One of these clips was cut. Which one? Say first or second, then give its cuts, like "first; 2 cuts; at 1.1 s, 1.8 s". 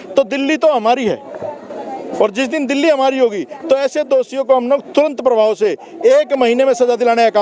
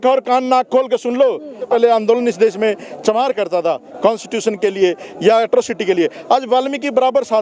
second; 1 cut; at 1.7 s